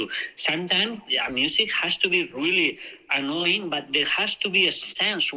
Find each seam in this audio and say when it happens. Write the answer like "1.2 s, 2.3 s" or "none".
none